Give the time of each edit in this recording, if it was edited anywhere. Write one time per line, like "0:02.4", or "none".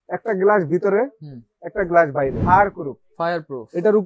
0:02.4